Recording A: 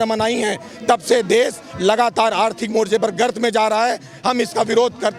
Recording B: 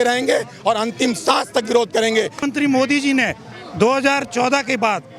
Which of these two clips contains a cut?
B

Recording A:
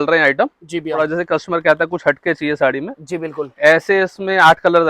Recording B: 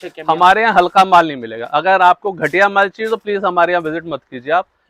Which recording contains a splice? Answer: A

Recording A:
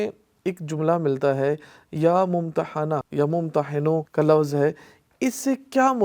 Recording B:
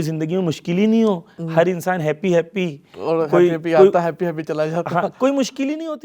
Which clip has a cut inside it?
A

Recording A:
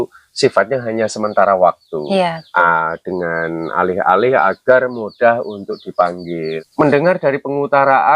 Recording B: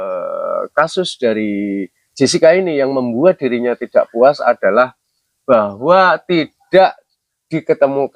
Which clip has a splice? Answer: A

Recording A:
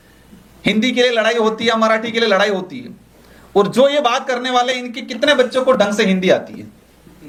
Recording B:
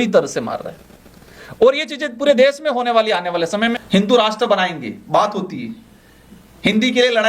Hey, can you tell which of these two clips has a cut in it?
B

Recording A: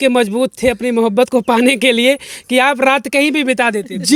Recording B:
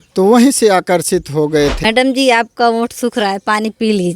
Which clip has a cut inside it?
B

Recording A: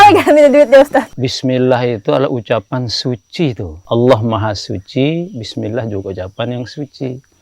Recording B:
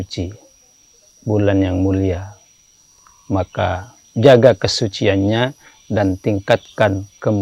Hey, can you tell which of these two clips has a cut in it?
A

